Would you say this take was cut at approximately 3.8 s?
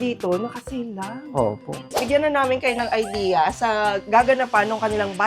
no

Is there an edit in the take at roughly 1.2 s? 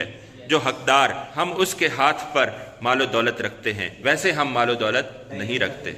yes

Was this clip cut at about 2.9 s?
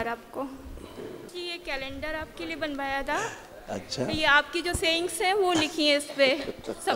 no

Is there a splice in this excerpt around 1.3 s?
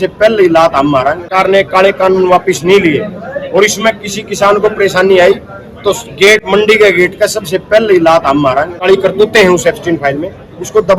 yes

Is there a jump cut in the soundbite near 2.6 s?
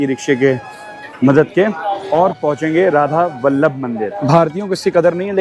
no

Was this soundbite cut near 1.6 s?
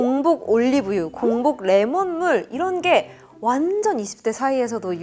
no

